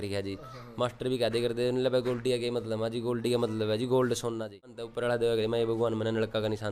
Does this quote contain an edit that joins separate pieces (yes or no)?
yes